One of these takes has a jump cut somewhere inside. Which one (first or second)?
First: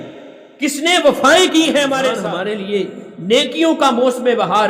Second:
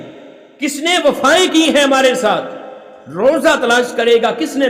first